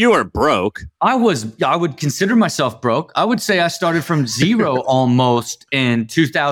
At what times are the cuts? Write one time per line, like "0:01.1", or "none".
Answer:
none